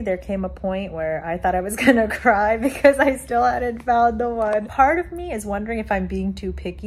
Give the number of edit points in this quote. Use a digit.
0